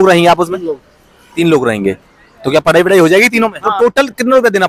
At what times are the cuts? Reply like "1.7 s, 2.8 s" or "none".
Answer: 3.6 s